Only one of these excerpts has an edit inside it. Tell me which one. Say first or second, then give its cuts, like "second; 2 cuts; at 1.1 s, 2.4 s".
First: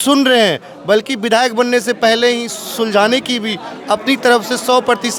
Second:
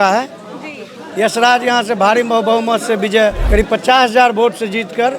second; 1 cut; at 3.4 s